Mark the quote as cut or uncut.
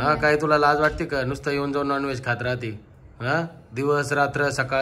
uncut